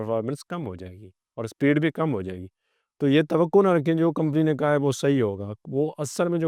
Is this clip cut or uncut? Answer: uncut